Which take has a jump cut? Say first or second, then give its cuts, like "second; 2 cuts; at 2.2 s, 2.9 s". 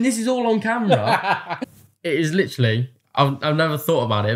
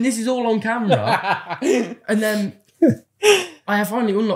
first; 1 cut; at 1.5 s